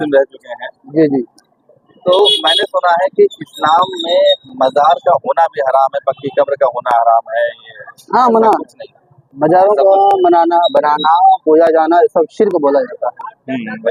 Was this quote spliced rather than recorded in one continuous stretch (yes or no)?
no